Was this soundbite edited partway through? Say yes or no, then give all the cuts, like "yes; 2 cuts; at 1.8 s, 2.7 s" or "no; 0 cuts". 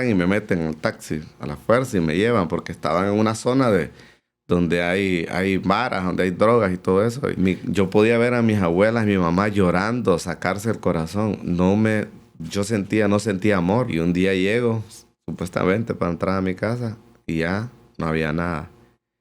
yes; 2 cuts; at 7.3 s, 13.9 s